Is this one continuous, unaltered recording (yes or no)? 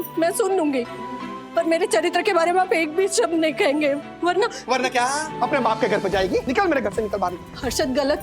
no